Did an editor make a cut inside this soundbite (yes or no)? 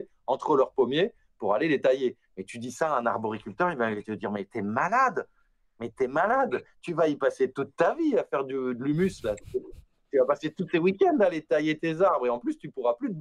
no